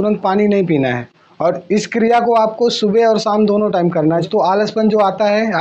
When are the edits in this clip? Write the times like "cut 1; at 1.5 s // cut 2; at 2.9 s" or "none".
cut 1; at 4.2 s